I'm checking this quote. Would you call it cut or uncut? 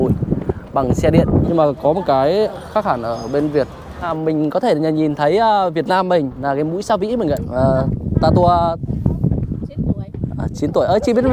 cut